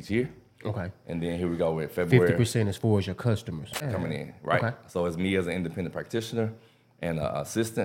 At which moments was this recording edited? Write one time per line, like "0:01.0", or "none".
0:03.9

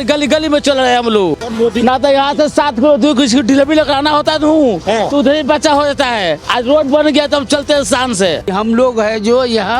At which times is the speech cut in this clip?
0:01.4
0:08.5

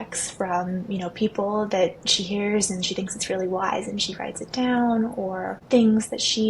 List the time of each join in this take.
0:05.5

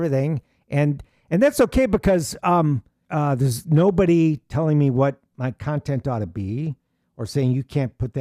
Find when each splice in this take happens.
0:03.0

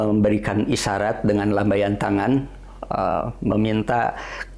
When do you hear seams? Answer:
none

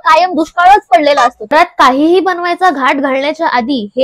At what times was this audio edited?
0:01.5

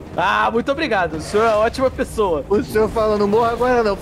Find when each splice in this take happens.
0:02.4

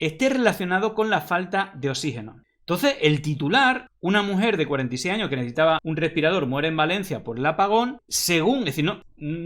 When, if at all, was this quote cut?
none

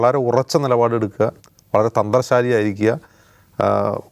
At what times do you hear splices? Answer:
none

